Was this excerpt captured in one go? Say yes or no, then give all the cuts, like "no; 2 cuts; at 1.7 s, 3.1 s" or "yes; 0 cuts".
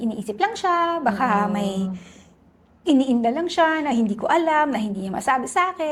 yes; 0 cuts